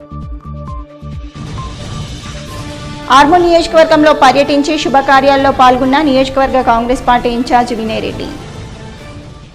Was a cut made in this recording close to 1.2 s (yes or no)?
yes